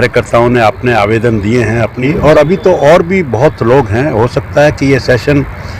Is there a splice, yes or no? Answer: yes